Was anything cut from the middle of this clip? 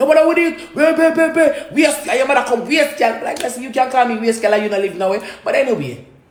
no; 0 cuts

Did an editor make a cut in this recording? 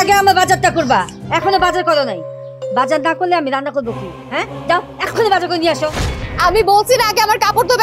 yes; 1 cut; at 6.2 s

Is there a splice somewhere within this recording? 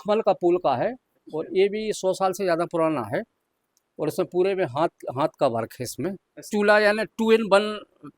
yes; 1 cut; at 6.5 s

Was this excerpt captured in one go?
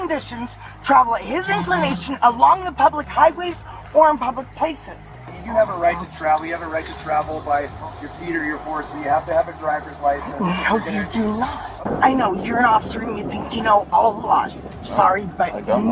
no; 2 cuts; at 5.4 s, 11.8 s

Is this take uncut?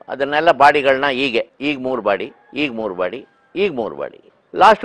yes; 0 cuts

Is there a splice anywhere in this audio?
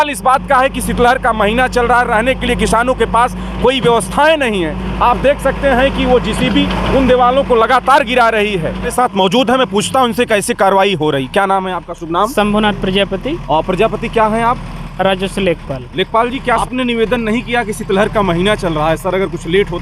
yes; 2 cuts; at 8.9 s, 16.6 s

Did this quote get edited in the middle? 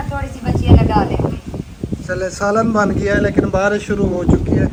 no; 0 cuts

